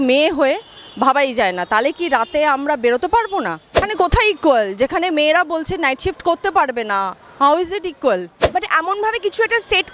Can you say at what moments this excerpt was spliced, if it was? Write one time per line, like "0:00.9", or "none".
0:03.9
0:08.4